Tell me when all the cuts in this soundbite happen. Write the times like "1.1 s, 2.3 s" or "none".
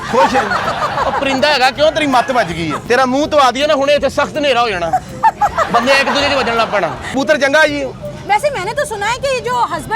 2.8 s, 7.1 s